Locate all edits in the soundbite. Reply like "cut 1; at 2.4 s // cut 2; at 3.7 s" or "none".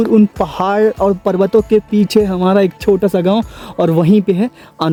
none